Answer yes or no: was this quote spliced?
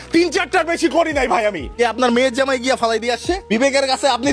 yes